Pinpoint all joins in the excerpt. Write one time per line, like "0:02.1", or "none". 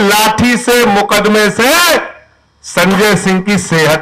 none